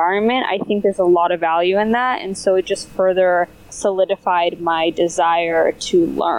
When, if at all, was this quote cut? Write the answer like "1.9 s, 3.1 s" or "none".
3.7 s